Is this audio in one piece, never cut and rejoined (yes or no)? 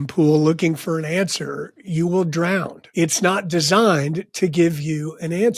no